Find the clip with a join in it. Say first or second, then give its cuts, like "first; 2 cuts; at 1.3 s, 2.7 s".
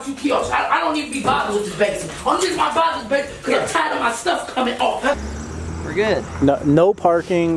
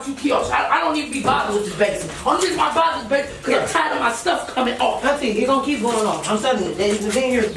first; 1 cut; at 5.2 s